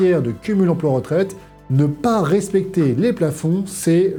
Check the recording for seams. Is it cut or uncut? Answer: uncut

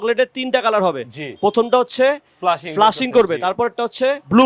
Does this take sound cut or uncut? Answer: uncut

